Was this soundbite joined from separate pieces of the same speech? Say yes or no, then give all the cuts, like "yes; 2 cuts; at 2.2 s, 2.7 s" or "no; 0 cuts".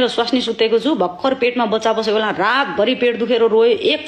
no; 0 cuts